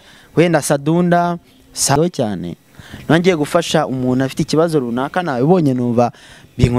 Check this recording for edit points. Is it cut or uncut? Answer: cut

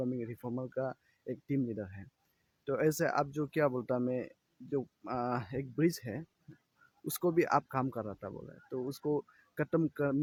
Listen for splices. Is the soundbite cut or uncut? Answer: uncut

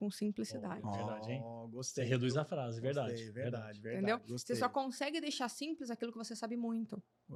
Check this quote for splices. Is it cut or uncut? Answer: uncut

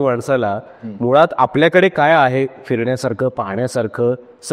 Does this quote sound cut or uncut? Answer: uncut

